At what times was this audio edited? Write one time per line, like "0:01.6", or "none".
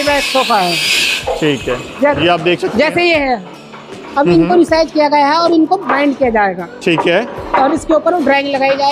none